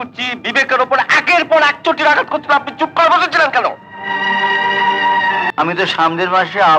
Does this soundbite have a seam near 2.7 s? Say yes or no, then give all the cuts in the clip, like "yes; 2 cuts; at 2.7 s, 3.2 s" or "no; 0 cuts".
no; 1 cut; at 5.5 s